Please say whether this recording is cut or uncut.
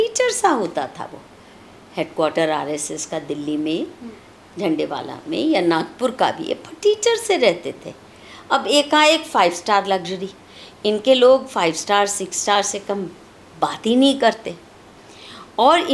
uncut